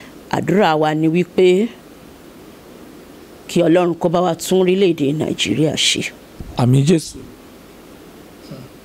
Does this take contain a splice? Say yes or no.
no